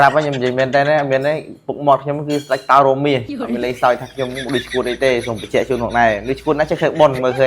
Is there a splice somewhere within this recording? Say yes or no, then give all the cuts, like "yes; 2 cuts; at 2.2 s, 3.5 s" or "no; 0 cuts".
no; 0 cuts